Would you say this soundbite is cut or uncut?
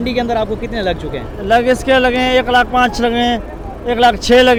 uncut